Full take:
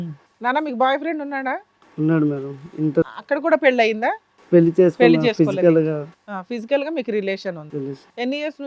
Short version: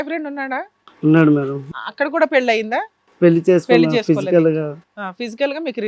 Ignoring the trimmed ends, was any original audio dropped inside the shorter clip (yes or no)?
yes